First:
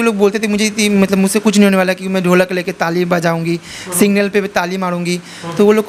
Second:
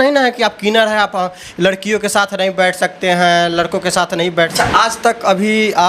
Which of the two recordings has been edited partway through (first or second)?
second